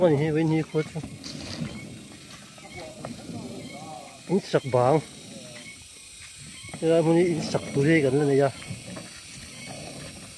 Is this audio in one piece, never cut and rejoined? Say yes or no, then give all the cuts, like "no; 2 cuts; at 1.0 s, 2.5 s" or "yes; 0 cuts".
yes; 0 cuts